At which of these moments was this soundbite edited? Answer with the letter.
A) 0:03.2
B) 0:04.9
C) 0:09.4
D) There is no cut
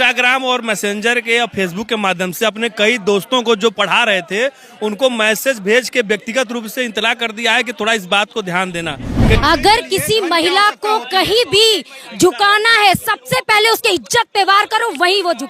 C